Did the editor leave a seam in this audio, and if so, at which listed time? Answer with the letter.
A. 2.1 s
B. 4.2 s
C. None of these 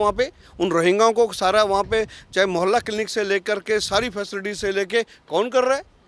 C